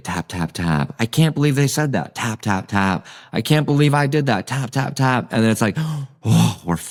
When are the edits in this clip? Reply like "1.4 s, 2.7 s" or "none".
none